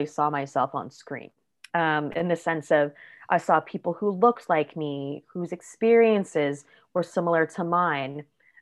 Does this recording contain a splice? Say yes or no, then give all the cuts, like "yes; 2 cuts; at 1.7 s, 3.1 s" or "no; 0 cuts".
no; 0 cuts